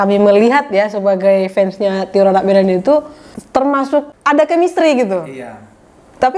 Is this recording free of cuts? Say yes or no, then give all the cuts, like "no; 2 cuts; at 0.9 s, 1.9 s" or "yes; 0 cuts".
no; 1 cut; at 4.1 s